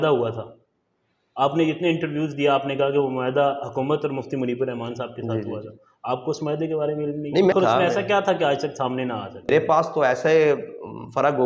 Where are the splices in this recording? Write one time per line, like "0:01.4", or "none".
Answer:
0:07.5
0:09.5